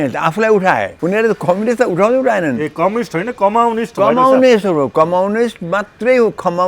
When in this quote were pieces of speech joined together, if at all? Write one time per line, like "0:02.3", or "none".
0:00.9